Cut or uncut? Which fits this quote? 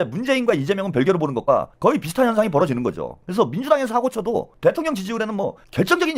uncut